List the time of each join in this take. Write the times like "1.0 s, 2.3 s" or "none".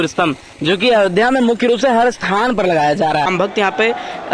3.3 s